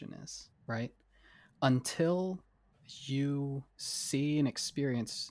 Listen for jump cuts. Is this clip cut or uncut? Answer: uncut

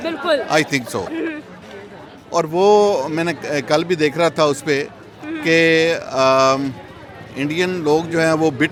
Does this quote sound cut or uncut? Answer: uncut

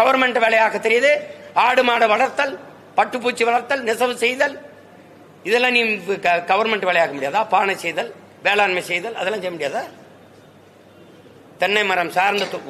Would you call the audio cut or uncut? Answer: uncut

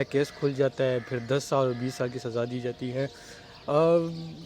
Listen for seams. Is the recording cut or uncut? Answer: uncut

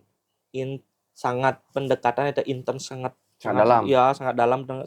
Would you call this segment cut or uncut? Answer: uncut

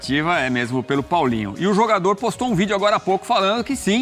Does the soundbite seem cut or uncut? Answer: uncut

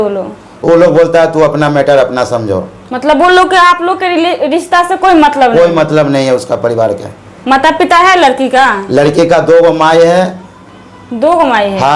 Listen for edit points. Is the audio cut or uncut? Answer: uncut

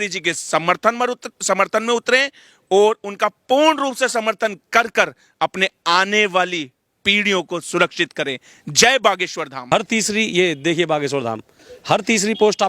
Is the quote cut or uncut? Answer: cut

